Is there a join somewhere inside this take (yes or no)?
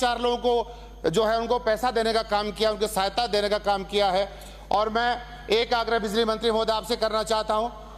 no